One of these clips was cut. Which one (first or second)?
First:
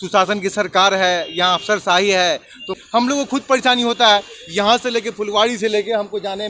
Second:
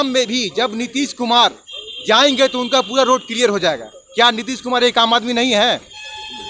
first